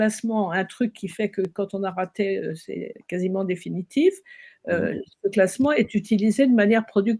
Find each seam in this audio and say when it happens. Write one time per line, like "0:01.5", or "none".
none